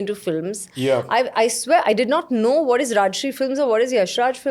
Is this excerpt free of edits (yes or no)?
yes